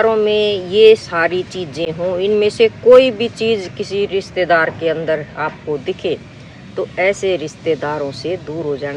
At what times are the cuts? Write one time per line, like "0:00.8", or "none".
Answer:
none